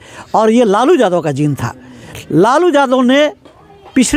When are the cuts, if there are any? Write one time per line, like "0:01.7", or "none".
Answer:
none

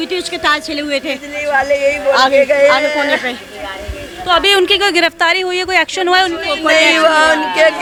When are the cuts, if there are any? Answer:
none

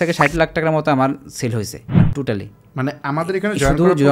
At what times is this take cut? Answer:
0:01.8

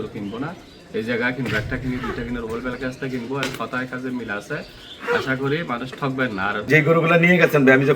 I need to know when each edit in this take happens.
0:06.7

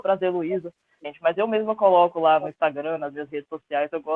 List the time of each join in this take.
0:01.0

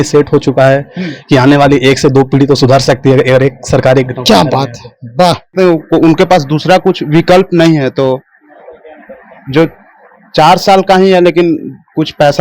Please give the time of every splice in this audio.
0:05.5

